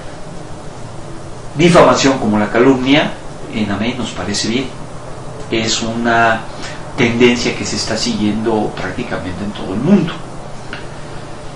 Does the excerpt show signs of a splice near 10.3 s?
no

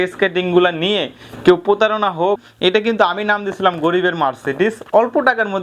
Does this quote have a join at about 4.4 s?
no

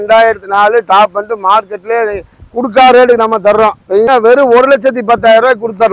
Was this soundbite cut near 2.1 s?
no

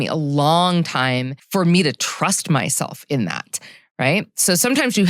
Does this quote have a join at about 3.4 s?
no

